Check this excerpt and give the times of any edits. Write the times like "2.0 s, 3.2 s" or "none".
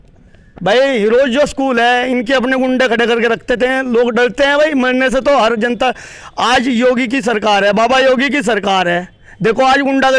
none